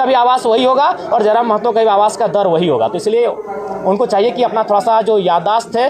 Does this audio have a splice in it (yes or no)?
no